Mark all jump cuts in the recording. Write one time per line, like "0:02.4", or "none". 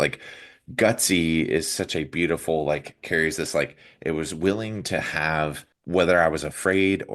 0:05.7